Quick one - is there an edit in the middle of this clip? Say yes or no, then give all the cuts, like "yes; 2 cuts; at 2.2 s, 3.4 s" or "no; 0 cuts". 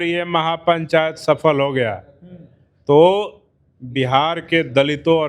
no; 0 cuts